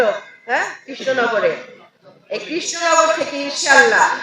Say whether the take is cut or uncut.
uncut